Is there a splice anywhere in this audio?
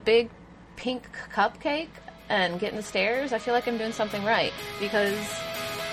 no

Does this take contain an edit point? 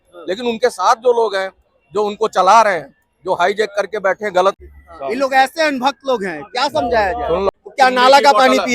yes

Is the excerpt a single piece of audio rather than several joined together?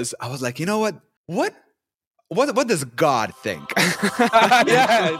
no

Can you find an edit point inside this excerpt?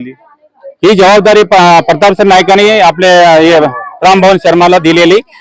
no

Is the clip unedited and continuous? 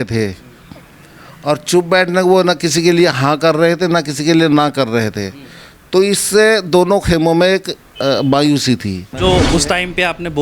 no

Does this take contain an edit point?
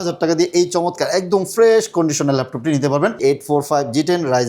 yes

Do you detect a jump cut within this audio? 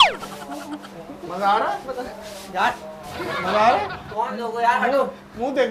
no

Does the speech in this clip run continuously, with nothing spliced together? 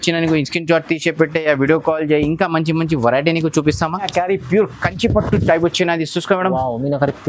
no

